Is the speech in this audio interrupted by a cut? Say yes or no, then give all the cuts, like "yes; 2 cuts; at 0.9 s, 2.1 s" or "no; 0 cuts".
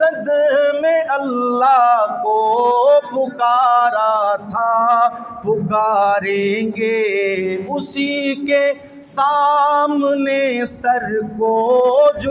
no; 0 cuts